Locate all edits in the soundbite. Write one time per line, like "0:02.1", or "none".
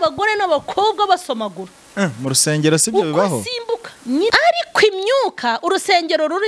0:04.3